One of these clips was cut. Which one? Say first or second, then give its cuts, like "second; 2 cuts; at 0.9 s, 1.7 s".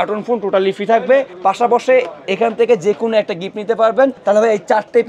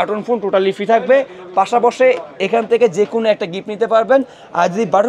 first; 2 cuts; at 1.3 s, 4.2 s